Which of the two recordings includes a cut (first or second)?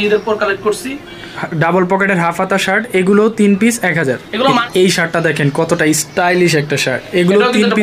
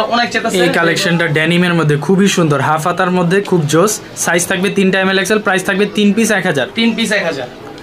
first